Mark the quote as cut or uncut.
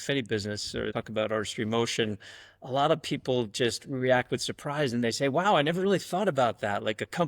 cut